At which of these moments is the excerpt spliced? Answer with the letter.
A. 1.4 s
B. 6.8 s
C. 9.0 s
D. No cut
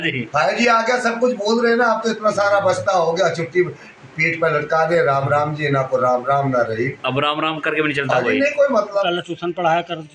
C